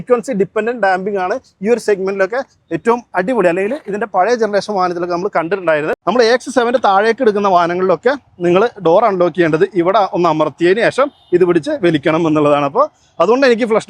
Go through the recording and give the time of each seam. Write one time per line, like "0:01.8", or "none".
0:05.9